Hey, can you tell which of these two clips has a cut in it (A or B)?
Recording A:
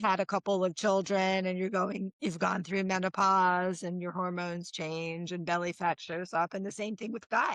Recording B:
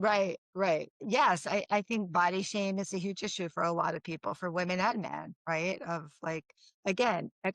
B